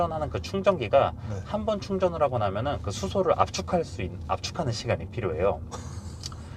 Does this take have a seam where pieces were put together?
no; 0 cuts

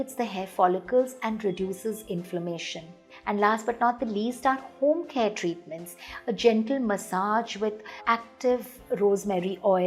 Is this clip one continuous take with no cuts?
yes; 0 cuts

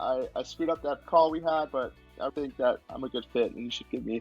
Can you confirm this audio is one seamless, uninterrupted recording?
no; 1 cut; at 1.0 s

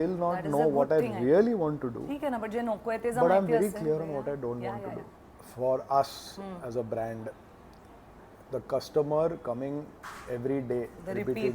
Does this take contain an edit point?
yes; 1 cut; at 5.2 s

